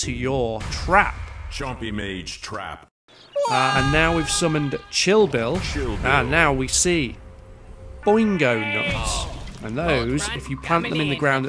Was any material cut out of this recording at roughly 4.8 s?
no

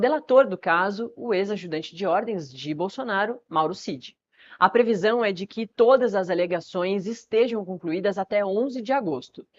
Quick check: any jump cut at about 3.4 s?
yes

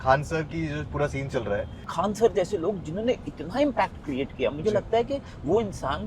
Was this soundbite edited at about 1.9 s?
yes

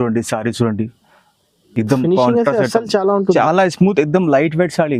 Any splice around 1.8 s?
no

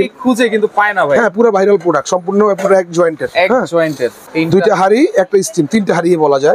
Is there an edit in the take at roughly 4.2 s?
yes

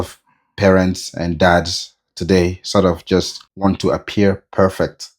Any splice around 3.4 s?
yes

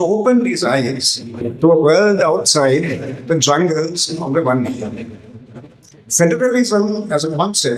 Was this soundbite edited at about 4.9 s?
no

